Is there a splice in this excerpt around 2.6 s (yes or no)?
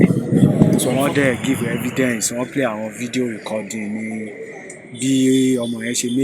no